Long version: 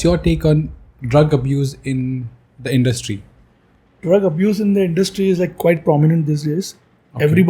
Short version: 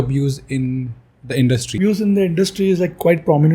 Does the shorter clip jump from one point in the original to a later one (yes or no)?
yes